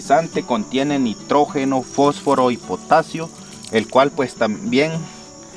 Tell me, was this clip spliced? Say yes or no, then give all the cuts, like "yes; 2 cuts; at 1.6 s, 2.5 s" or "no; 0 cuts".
no; 0 cuts